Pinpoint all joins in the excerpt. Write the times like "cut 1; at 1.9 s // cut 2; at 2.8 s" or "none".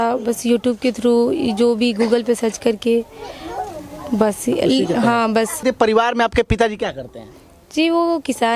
cut 1; at 5.6 s